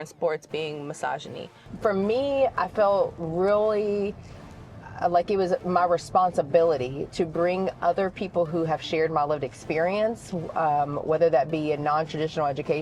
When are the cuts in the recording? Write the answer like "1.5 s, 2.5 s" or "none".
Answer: 1.7 s